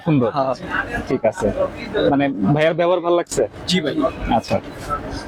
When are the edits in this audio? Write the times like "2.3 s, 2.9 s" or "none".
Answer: none